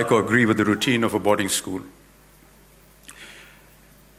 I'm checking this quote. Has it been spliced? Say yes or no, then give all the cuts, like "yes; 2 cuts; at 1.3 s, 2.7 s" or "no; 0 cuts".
no; 0 cuts